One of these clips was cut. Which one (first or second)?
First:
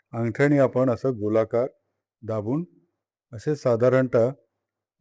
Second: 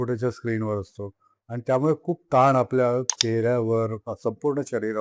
second